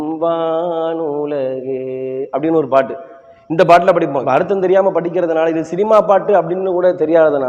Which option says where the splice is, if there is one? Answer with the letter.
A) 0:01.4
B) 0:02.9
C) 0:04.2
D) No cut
C